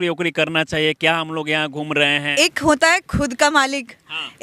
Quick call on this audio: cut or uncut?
cut